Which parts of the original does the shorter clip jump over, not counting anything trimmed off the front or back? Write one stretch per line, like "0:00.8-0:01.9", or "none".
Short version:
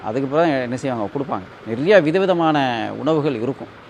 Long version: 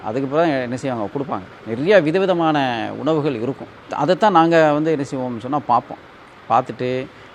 none